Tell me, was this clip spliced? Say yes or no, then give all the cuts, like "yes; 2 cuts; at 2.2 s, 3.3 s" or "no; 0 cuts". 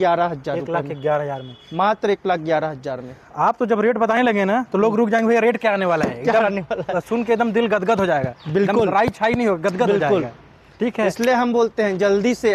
no; 0 cuts